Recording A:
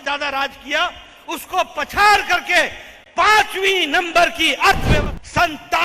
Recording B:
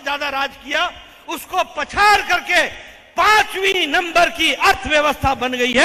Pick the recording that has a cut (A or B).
A